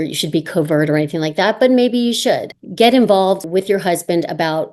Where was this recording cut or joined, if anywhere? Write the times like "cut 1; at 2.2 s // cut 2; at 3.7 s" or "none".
cut 1; at 2.6 s // cut 2; at 3.4 s